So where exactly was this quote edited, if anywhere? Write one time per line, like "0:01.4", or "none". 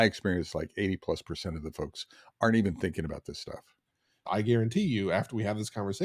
0:04.2